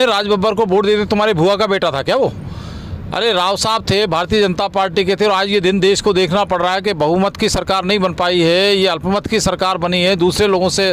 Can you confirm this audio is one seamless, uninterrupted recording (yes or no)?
yes